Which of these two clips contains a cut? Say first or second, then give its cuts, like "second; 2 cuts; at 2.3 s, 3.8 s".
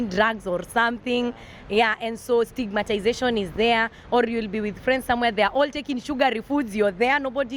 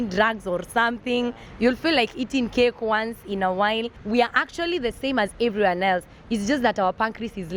second; 2 cuts; at 1.4 s, 3.9 s